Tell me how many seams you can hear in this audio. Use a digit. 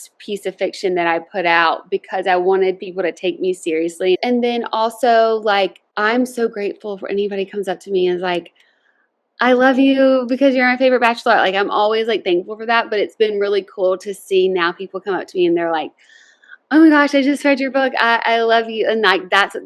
2